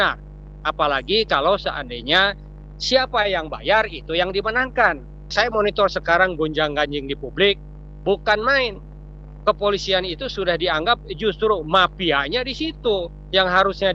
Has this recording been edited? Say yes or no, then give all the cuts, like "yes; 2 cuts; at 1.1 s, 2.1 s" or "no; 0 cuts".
yes; 1 cut; at 5.3 s